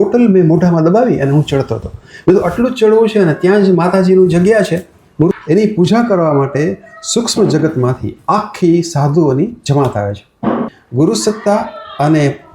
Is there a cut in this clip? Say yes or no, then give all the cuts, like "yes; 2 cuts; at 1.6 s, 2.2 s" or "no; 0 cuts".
yes; 2 cuts; at 5.4 s, 10.8 s